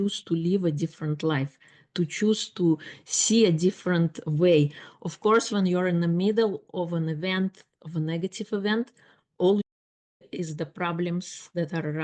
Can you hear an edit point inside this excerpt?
no; 0 cuts

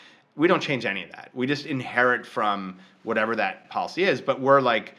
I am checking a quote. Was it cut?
yes; 1 cut; at 3.6 s

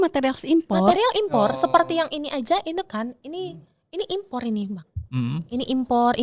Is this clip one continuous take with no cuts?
yes; 0 cuts

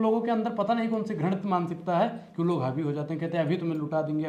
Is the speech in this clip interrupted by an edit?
no; 0 cuts

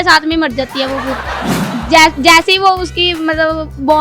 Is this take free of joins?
no; 1 cut; at 1.2 s

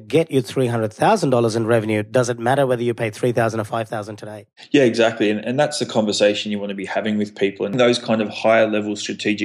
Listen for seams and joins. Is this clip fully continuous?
no; 1 cut; at 7.7 s

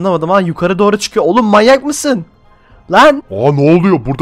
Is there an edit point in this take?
no; 0 cuts

